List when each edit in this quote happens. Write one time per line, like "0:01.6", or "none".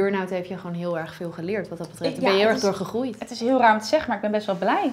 none